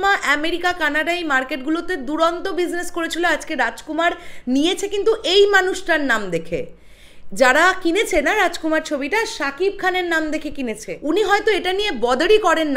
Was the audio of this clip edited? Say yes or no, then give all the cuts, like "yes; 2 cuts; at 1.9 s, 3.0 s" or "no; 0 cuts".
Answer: yes; 1 cut; at 10.9 s